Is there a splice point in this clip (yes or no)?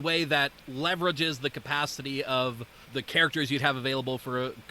yes